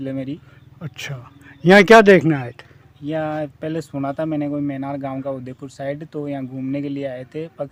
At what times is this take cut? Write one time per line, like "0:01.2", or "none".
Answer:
none